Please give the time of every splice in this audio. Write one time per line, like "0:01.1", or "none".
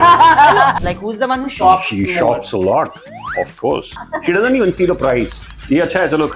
0:00.7
0:04.1